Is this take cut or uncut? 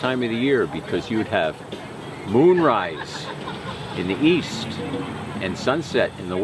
uncut